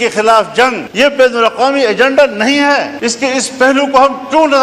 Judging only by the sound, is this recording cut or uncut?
cut